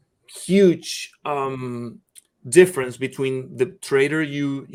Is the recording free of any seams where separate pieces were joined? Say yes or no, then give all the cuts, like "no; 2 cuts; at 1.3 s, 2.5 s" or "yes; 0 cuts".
yes; 0 cuts